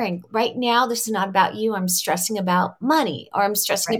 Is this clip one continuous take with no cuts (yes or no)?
yes